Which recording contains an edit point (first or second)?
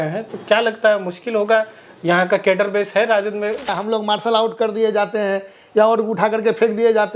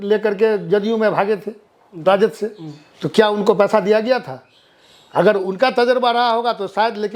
first